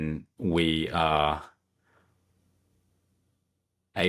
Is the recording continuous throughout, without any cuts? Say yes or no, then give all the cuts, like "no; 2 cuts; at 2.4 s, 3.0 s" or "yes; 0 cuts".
yes; 0 cuts